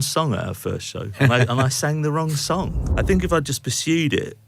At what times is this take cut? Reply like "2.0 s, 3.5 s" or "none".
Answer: 1.1 s, 2.9 s

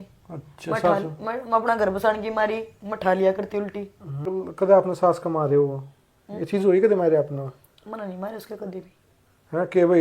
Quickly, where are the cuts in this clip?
4.3 s

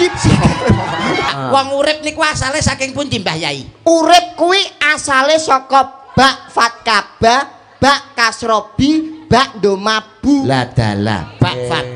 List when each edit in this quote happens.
1.3 s

